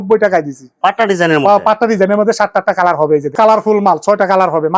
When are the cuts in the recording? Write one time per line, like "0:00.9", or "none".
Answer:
0:03.3